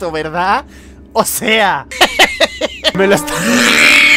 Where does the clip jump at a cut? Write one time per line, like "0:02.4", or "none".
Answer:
0:01.9
0:02.9